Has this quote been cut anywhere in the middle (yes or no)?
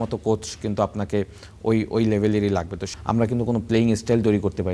yes